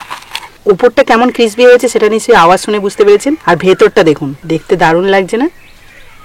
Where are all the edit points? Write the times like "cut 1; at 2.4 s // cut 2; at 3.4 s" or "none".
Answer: cut 1; at 4.4 s